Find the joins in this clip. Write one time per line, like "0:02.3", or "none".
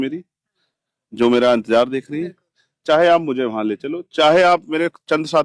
none